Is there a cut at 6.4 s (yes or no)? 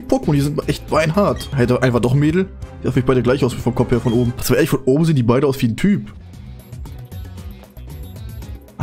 no